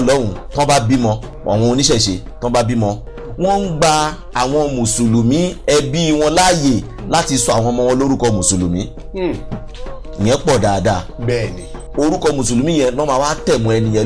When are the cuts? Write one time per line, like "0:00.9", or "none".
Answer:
0:01.3
0:11.8